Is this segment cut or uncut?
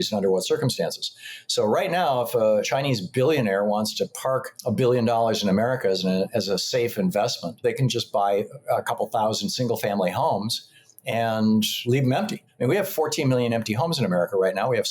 cut